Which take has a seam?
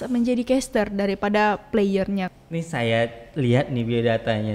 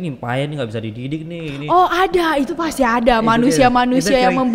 first; 1 cut; at 2.3 s

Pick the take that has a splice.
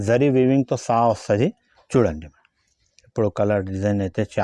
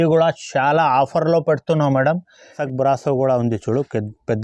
second; 1 cut; at 2.5 s

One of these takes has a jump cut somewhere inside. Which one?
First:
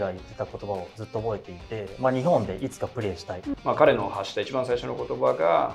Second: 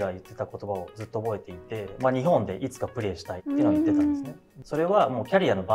first; 1 cut; at 3.5 s

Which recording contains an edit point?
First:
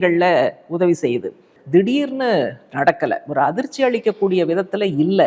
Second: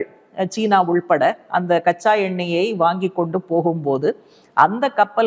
first; 1 cut; at 1.6 s

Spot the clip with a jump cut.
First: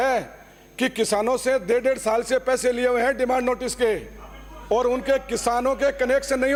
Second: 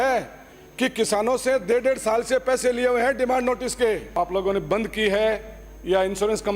second; 1 cut; at 4.2 s

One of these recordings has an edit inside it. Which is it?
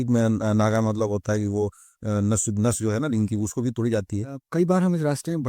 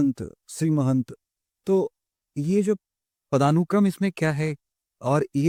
first; 1 cut; at 4.4 s

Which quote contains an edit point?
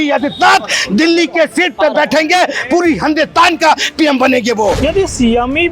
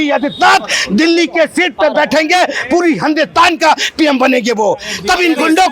first; 1 cut; at 4.8 s

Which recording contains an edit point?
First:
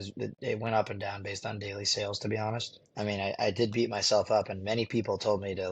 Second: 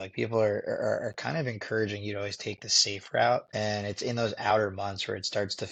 first; 1 cut; at 2.8 s

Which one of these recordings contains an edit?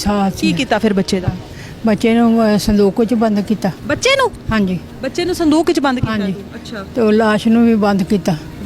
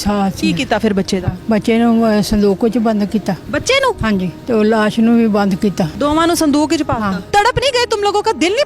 second; 4 cuts; at 1.3 s, 4.0 s, 5.9 s, 7.2 s

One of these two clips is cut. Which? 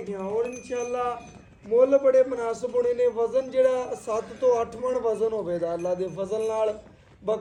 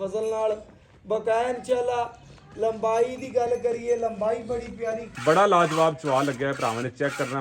second; 1 cut; at 5.1 s

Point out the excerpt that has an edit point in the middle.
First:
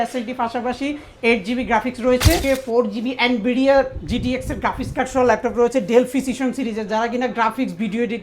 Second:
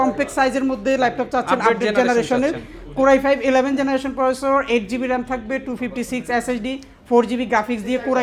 first; 1 cut; at 2.4 s

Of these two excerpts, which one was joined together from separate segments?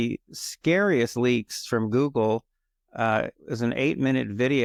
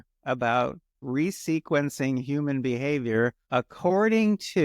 second; 2 cuts; at 1.0 s, 3.4 s

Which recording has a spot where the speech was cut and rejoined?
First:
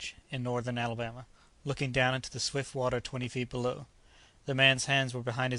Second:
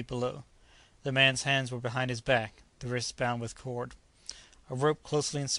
first; 1 cut; at 1.8 s

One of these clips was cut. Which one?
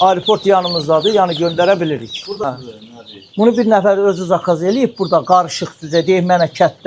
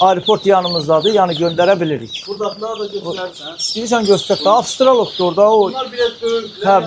first; 1 cut; at 2.4 s

